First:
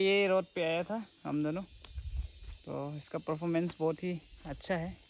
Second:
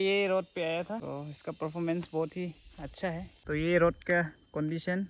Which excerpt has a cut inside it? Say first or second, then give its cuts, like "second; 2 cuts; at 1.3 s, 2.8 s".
second; 2 cuts; at 1.0 s, 3.3 s